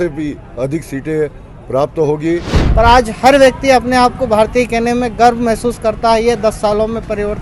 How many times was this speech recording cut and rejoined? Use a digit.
1